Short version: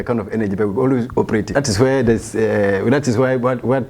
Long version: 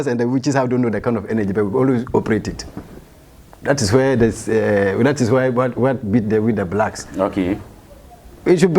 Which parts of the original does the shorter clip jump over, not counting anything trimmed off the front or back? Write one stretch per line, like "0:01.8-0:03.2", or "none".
0:02.5-0:03.6